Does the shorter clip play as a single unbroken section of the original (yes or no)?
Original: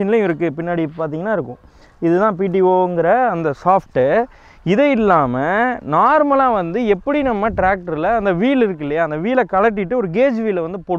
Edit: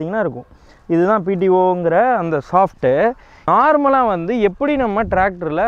no